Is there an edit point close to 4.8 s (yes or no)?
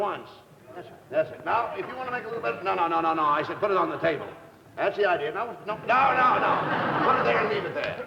no